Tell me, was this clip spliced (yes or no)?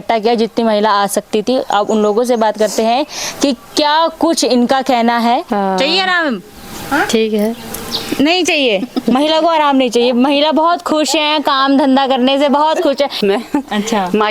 yes